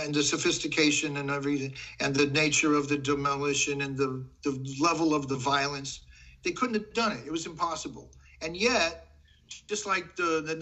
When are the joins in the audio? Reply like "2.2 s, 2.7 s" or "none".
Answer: none